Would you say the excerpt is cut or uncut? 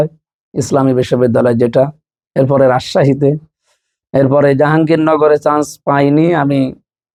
uncut